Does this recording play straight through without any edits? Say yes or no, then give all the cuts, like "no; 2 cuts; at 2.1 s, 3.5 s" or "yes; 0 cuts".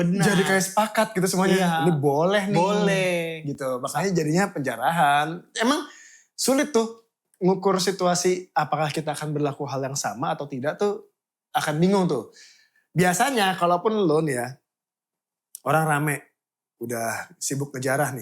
yes; 0 cuts